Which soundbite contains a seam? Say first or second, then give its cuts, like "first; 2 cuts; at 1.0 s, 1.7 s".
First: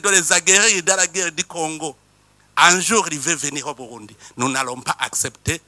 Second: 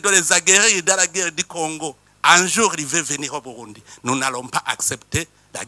second; 1 cut; at 2.1 s